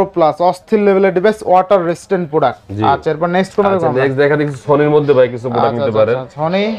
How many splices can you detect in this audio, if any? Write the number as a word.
zero